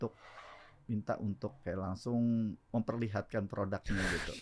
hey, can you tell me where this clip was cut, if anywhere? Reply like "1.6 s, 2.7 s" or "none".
1.6 s, 2.6 s